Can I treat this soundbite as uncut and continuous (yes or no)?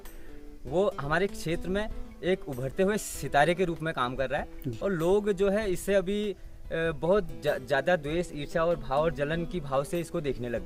yes